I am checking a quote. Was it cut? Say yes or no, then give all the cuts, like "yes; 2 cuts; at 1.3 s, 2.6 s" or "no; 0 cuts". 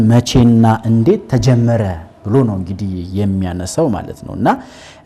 no; 0 cuts